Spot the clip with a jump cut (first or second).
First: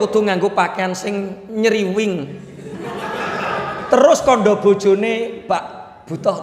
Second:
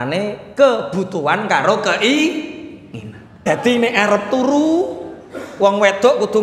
second